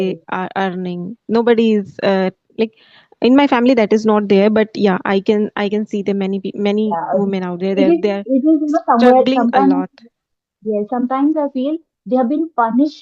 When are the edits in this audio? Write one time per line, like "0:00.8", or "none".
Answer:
none